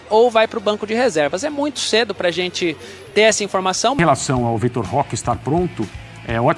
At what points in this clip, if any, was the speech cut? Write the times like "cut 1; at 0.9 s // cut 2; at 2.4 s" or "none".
cut 1; at 4.0 s